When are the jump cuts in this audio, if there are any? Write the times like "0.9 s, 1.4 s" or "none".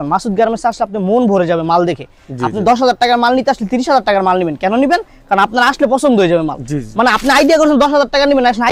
none